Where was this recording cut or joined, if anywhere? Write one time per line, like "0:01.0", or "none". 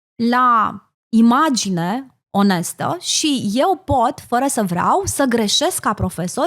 none